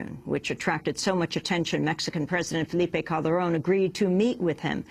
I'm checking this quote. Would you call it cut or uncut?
cut